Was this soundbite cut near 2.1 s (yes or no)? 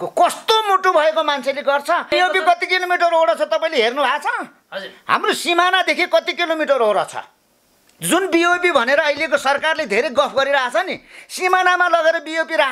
yes